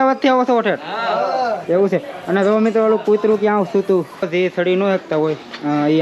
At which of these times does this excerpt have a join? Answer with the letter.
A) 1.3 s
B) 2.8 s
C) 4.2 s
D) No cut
C